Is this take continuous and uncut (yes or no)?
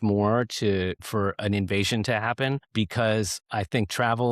no